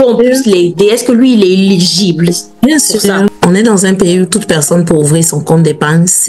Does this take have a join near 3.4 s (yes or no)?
yes